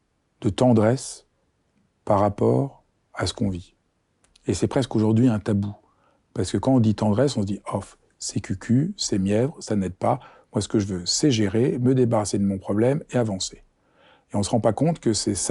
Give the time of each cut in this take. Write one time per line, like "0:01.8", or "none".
none